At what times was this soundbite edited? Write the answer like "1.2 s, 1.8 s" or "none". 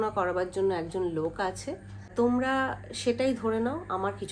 2.1 s